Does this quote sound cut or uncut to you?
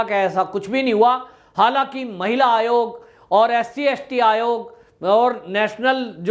uncut